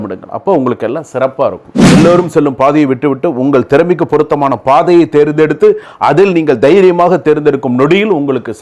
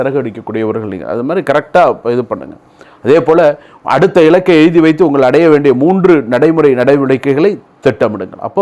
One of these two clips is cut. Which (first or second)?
first